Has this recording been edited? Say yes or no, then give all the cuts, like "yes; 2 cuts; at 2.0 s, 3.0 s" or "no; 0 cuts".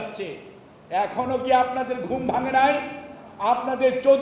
no; 0 cuts